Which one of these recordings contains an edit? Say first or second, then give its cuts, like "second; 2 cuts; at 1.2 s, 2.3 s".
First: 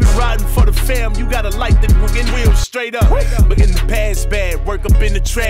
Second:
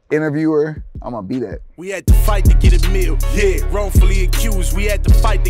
second; 1 cut; at 1.7 s